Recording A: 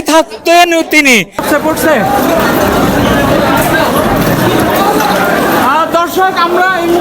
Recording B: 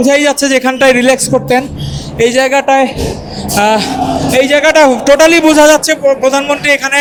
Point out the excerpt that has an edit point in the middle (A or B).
A